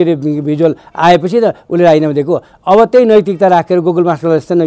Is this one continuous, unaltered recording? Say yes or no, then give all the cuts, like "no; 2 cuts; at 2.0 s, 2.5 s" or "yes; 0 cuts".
yes; 0 cuts